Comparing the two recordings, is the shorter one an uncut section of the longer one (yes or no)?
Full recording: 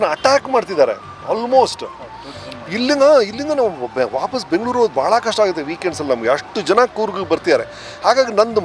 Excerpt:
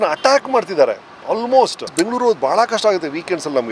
no